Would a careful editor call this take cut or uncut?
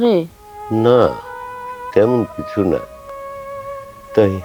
uncut